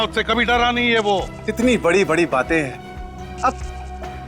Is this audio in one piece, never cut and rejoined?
no; 1 cut; at 1.4 s

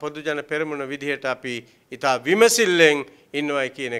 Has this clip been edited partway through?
no; 0 cuts

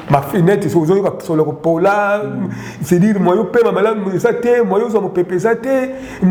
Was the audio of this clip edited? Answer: no; 0 cuts

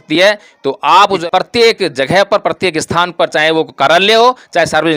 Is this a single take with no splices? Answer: no; 1 cut; at 1.2 s

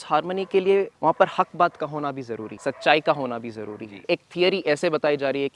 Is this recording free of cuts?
no; 3 cuts; at 0.9 s, 2.4 s, 4.1 s

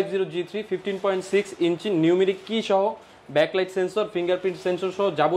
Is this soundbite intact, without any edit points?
yes; 0 cuts

